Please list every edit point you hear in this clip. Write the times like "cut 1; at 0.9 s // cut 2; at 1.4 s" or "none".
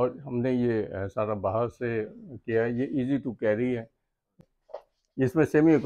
cut 1; at 4.4 s